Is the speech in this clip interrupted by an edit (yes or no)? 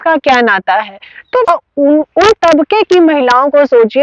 yes